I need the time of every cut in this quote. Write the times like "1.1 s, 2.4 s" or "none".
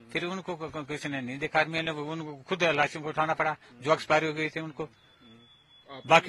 none